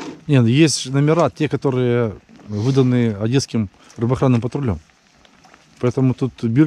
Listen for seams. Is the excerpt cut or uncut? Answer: uncut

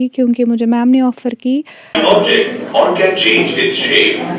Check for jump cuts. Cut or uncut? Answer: cut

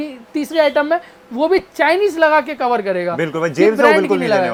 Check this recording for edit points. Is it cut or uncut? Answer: uncut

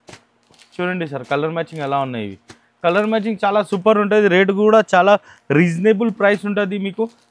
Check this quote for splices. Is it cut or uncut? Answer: uncut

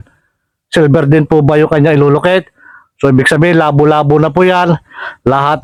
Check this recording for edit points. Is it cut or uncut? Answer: uncut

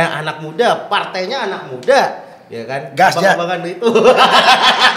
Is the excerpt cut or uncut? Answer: uncut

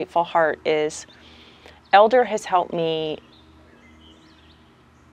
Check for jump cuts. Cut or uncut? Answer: uncut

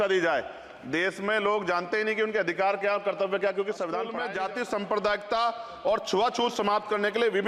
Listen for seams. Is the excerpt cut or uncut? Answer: cut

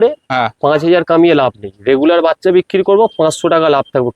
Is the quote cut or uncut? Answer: uncut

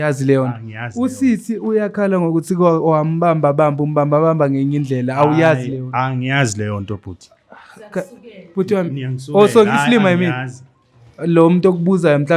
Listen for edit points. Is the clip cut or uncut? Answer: uncut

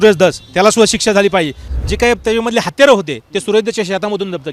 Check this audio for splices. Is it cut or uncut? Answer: cut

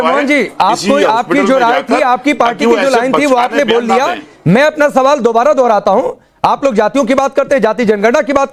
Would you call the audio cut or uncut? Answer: uncut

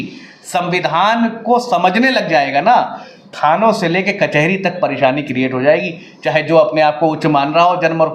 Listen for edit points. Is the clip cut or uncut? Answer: uncut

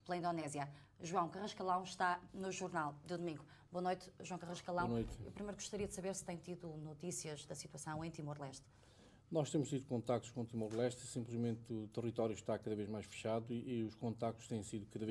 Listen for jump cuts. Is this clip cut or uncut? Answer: uncut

